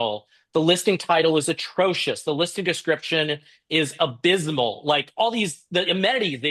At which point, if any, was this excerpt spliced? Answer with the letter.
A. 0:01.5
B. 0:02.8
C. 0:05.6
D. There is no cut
D